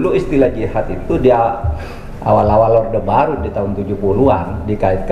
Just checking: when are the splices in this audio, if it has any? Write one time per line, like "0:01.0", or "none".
none